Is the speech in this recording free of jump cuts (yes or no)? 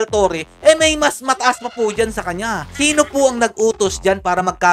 no